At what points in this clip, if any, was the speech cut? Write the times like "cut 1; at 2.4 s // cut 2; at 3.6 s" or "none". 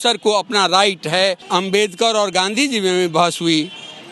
cut 1; at 1.4 s